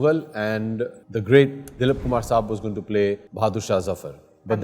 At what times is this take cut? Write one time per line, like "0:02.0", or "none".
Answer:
0:01.0
0:03.3